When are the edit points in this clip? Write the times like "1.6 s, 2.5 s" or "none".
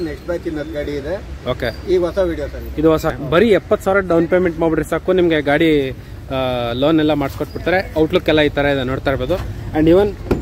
3.1 s